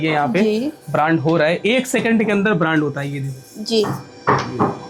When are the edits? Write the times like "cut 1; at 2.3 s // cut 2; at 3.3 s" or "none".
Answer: none